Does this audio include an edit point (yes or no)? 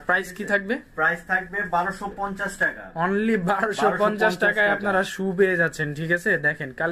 no